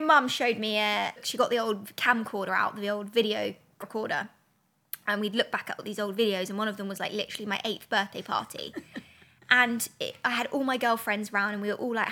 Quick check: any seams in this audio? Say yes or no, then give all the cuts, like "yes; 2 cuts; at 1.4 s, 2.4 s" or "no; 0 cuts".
yes; 2 cuts; at 1.2 s, 3.8 s